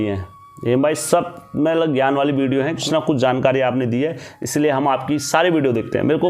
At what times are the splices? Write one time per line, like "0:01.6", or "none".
0:02.8